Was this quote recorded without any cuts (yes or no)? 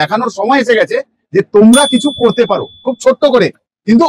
yes